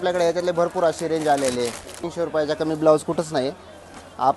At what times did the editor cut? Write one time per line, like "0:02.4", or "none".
0:02.0